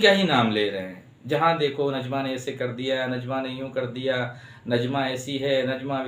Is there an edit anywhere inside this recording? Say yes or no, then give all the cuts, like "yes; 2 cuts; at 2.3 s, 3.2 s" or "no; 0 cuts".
no; 0 cuts